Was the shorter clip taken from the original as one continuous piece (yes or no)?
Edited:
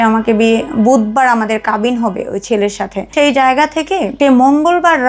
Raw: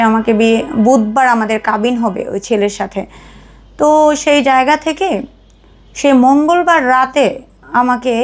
no